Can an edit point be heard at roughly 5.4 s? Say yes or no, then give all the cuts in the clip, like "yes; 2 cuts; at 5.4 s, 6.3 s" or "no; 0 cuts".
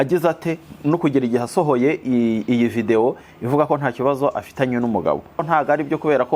yes; 1 cut; at 5.4 s